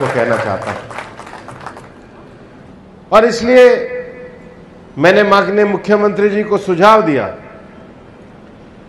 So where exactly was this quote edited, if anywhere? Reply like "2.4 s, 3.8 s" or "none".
2.7 s